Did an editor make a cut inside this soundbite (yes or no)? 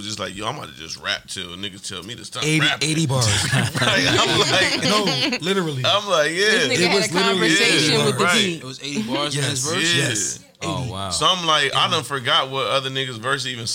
no